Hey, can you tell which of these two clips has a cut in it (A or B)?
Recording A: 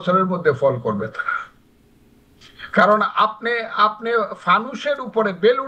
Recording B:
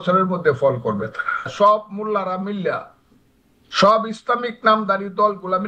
B